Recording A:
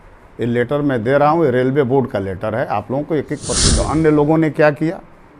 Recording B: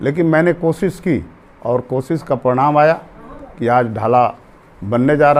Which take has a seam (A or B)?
A